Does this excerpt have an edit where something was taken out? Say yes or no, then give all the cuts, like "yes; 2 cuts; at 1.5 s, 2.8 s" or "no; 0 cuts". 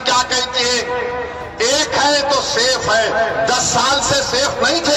no; 0 cuts